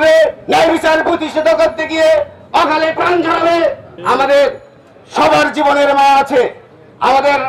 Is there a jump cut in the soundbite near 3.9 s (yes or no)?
yes